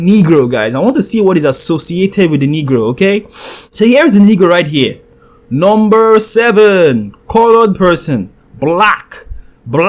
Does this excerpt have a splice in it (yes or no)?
no